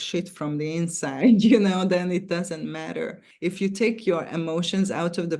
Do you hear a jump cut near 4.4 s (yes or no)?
no